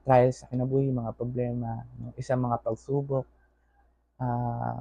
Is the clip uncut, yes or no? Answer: yes